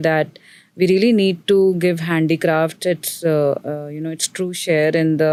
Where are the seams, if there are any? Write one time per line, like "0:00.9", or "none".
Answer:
none